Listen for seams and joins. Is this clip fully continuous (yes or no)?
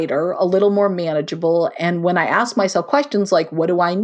yes